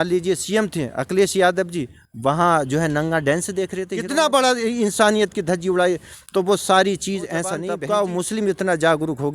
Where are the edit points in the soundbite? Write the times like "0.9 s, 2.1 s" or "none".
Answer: 3.9 s, 7.7 s